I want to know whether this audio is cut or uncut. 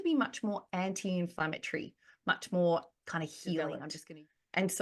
cut